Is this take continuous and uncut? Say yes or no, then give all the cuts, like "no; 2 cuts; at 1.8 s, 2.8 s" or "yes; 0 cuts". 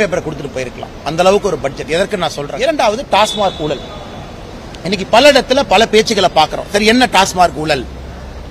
no; 1 cut; at 2.7 s